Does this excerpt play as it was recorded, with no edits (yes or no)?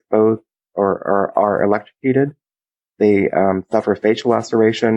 yes